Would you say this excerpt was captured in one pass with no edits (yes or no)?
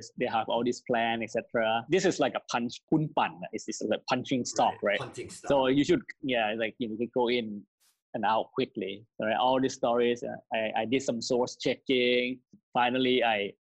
yes